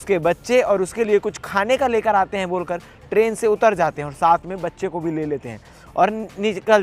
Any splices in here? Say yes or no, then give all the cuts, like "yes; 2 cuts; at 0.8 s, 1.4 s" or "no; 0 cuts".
no; 0 cuts